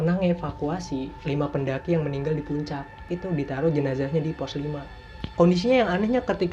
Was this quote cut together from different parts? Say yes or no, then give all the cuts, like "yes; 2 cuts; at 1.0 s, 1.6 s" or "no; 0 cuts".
yes; 3 cuts; at 1.1 s, 3.0 s, 5.2 s